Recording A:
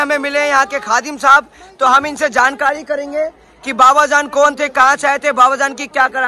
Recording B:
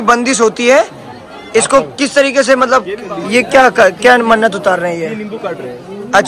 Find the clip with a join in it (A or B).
B